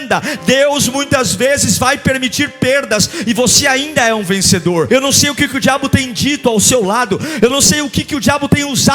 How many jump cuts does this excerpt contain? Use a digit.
1